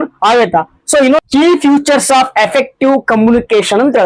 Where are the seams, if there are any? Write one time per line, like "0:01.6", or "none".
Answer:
0:01.2